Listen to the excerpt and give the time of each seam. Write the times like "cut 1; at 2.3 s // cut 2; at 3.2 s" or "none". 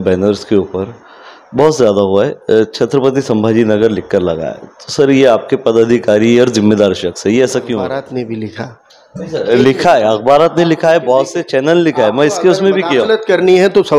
cut 1; at 7.9 s